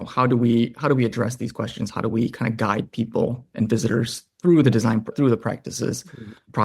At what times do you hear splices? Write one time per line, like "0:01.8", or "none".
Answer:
0:05.1